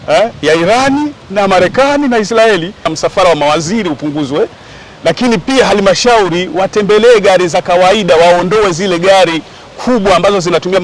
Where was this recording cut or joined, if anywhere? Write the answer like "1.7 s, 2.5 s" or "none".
2.9 s